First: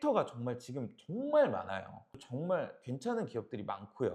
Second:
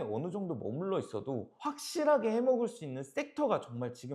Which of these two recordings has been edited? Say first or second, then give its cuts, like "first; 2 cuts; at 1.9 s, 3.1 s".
first; 1 cut; at 2.2 s